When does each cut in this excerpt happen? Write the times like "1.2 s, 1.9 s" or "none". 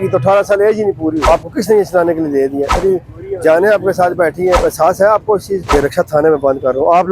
1.2 s, 2.8 s, 4.6 s, 5.7 s